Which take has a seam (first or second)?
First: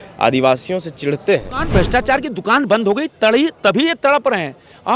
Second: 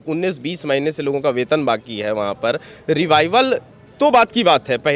first